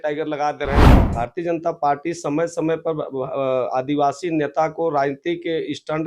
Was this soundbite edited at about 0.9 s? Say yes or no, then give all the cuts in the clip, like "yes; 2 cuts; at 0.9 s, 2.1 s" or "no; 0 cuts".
yes; 1 cut; at 0.9 s